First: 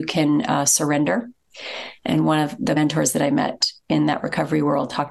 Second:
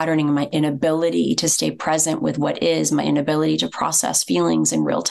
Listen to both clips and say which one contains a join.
first; 1 cut; at 2.8 s

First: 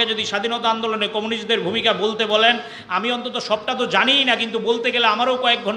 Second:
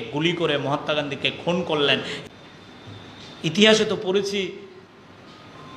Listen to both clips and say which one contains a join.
second; 1 cut; at 2.2 s

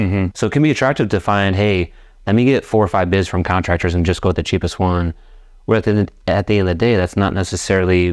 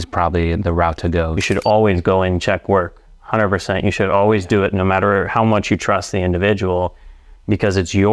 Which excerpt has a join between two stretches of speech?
second; 1 cut; at 1.4 s

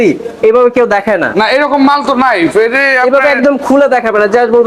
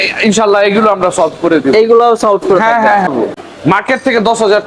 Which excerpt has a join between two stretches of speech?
second; 1 cut; at 3.3 s

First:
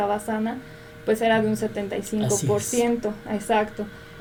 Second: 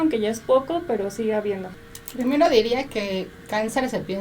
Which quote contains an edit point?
second; 1 cut; at 1.7 s

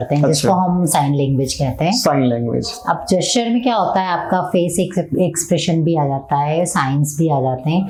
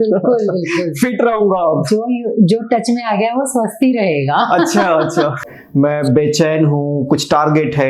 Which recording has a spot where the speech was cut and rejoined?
second; 1 cut; at 5.5 s

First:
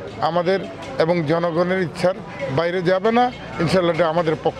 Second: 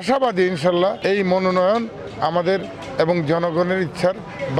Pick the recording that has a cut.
second; 1 cut; at 1.0 s

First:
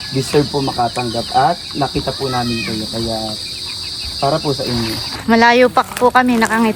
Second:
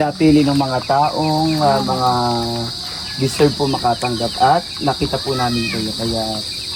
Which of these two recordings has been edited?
first; 1 cut; at 5.2 s

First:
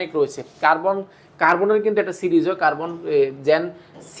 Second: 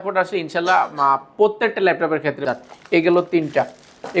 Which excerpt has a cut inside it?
second; 1 cut; at 2.4 s

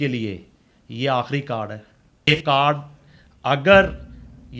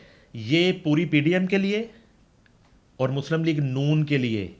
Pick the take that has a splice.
first; 1 cut; at 2.3 s

